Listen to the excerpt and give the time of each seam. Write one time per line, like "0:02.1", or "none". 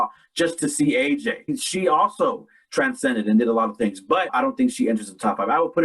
0:01.6
0:04.3